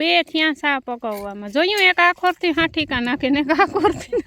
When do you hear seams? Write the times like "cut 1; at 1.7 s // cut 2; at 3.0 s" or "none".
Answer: none